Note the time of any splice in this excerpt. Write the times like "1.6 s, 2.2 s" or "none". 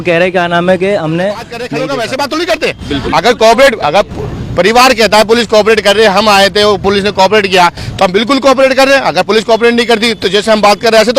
1.8 s